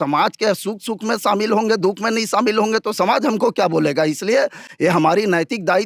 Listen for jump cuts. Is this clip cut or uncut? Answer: uncut